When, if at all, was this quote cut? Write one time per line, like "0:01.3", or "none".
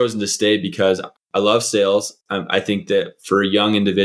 0:01.1